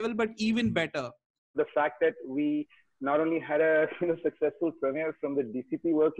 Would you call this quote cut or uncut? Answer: cut